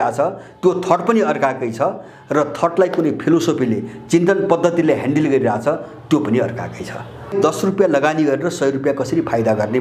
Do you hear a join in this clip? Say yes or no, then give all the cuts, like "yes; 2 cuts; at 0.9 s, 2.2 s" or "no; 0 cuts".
yes; 1 cut; at 7.4 s